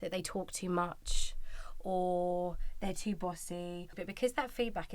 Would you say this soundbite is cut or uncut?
cut